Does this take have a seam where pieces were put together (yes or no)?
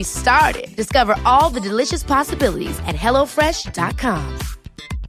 no